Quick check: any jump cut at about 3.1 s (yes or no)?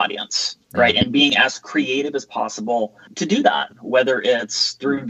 yes